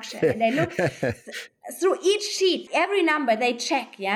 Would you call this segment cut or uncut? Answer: cut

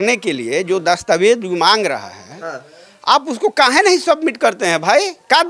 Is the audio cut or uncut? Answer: uncut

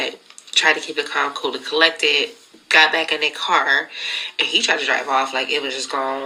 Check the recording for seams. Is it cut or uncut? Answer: uncut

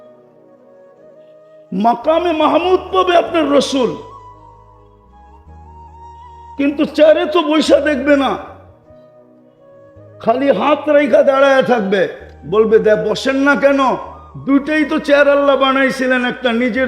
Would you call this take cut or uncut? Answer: cut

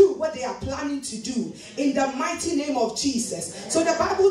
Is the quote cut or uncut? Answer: uncut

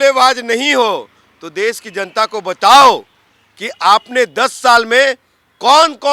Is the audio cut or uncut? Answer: uncut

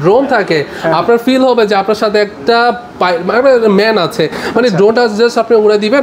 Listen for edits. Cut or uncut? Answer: uncut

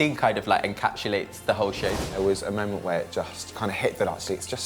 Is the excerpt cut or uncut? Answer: cut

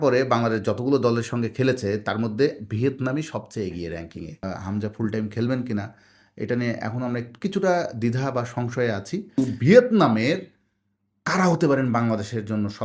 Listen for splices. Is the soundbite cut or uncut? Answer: cut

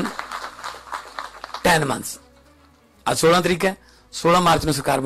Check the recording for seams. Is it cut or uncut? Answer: uncut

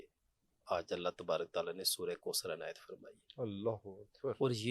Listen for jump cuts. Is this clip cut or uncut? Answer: uncut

